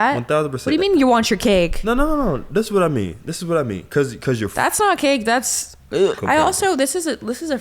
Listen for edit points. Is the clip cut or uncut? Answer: cut